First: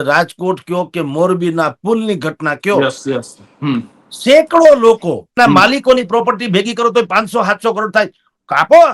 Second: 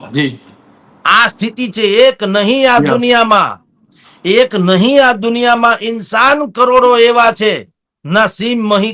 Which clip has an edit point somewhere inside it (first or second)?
first